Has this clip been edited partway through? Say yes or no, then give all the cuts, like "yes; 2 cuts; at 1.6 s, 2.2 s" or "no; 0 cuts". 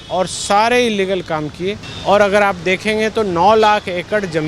yes; 1 cut; at 1.9 s